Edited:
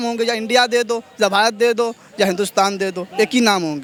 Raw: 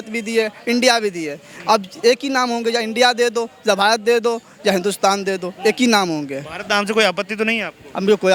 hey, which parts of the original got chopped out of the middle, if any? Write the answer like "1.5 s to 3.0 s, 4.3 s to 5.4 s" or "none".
none